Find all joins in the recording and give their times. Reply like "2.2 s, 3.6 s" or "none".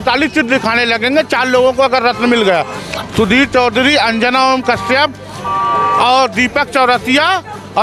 none